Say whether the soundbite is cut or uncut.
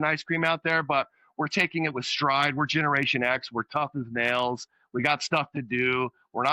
uncut